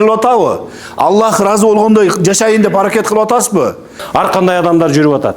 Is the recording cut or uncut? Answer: cut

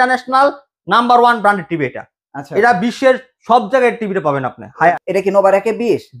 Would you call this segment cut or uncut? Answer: cut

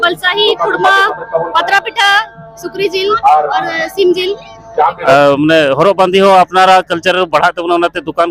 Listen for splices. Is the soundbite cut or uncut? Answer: cut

